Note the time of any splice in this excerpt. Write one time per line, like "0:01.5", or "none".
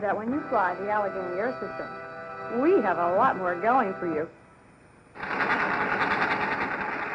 0:05.3